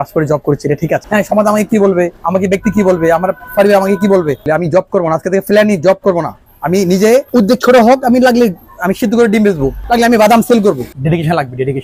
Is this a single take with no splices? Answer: no; 6 cuts; at 1.0 s, 2.2 s, 4.4 s, 7.3 s, 9.8 s, 10.9 s

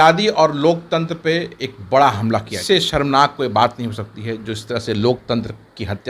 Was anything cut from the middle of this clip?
yes; 1 cut; at 2.5 s

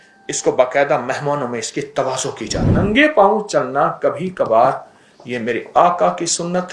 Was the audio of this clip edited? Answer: yes; 1 cut; at 2.7 s

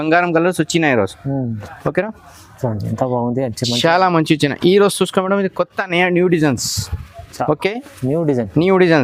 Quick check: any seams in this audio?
no; 0 cuts

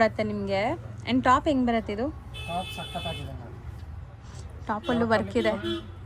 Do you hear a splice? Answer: no; 0 cuts

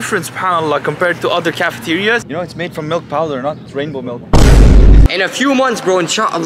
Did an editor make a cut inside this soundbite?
yes; 2 cuts; at 2.2 s, 5.1 s

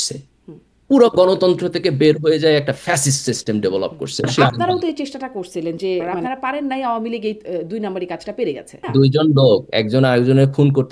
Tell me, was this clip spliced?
yes; 3 cuts; at 4.3 s, 6.1 s, 8.8 s

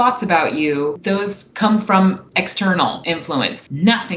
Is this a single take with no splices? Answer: no; 3 cuts; at 1.0 s, 2.2 s, 3.3 s

